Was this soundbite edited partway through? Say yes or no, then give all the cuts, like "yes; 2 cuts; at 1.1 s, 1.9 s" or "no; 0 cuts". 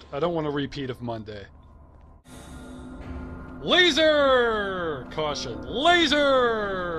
no; 0 cuts